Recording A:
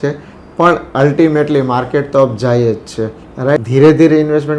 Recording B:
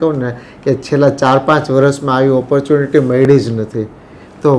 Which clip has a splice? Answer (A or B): A